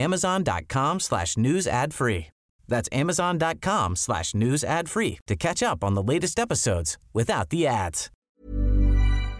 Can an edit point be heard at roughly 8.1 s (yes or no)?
yes